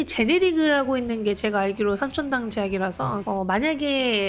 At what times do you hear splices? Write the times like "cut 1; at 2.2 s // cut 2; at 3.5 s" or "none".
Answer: cut 1; at 3.2 s